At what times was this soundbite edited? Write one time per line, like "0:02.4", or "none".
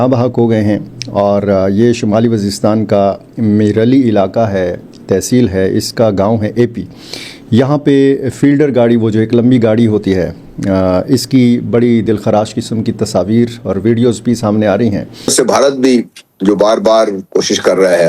0:15.3